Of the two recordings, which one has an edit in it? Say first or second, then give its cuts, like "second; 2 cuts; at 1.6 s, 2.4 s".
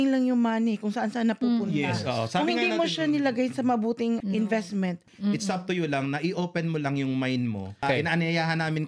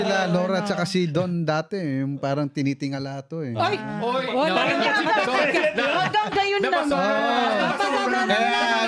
first; 3 cuts; at 4.2 s, 5.1 s, 7.8 s